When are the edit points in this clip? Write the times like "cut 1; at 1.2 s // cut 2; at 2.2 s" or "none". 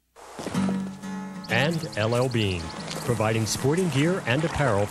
cut 1; at 1.5 s